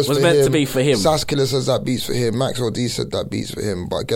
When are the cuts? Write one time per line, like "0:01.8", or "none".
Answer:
none